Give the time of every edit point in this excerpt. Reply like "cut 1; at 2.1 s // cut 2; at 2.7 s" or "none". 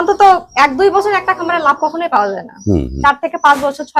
none